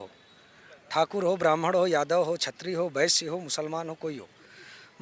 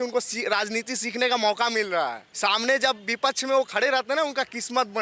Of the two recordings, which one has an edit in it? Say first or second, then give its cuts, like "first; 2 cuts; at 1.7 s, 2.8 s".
second; 1 cut; at 2.2 s